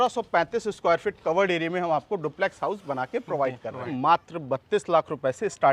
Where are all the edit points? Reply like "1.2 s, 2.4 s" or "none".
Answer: 3.9 s